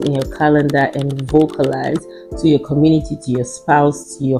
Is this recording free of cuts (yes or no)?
yes